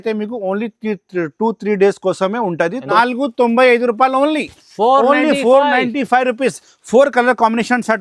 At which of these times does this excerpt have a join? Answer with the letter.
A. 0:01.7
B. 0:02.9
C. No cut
B